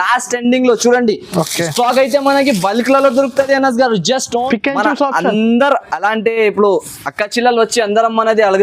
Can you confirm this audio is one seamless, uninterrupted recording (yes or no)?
no